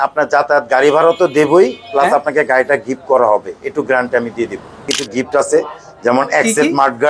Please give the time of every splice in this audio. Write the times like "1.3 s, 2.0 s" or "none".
5.0 s